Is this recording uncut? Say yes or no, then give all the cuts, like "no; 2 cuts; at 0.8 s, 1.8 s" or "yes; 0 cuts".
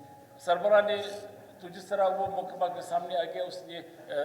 yes; 0 cuts